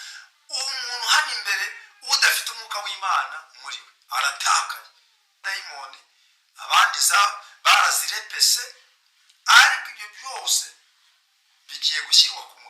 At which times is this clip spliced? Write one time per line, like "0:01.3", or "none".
0:05.4